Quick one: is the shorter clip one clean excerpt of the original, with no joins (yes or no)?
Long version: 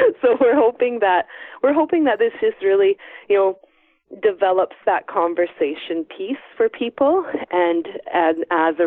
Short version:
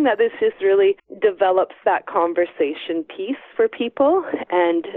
no